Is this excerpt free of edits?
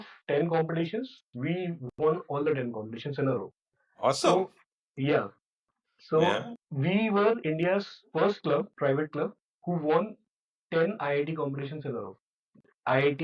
yes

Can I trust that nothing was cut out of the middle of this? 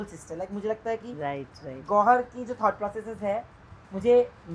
yes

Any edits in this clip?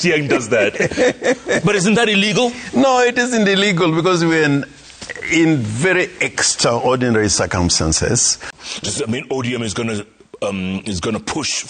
yes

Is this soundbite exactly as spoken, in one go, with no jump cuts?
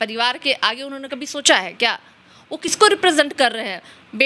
yes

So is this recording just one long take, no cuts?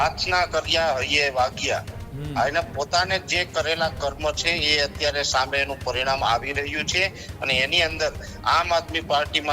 yes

